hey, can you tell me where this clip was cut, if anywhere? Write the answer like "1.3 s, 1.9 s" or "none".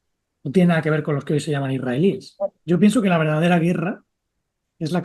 2.6 s

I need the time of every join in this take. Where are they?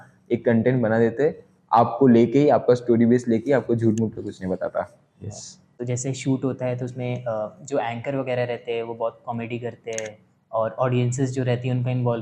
5.6 s

